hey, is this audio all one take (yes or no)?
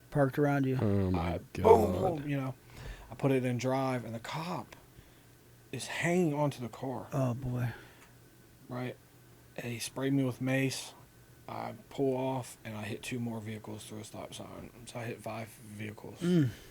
yes